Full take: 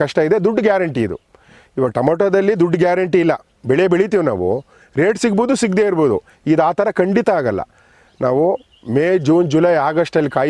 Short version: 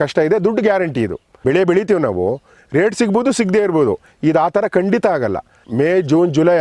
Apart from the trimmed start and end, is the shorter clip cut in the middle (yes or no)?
yes